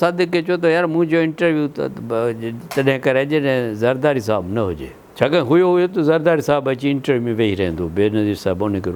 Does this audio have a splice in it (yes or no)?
no